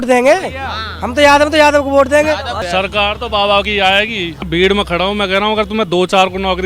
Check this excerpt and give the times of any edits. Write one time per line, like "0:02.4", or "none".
0:02.5
0:04.5